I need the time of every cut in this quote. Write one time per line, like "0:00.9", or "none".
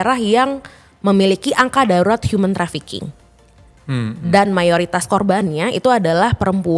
none